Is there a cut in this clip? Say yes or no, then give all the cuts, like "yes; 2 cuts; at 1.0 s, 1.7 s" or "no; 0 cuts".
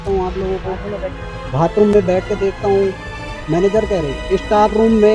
no; 0 cuts